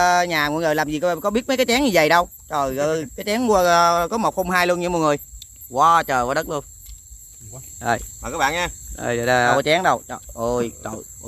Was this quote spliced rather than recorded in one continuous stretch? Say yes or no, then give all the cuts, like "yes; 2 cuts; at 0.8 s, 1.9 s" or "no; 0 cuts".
yes; 1 cut; at 9.5 s